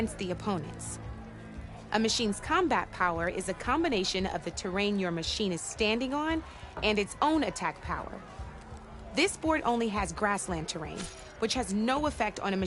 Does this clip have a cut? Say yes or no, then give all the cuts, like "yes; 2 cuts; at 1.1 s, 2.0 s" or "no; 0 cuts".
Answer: no; 0 cuts